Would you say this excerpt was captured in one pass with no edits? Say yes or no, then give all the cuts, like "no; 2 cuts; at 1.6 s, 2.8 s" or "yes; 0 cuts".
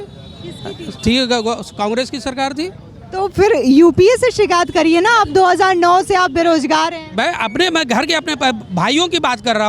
yes; 0 cuts